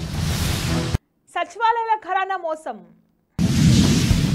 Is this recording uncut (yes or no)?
yes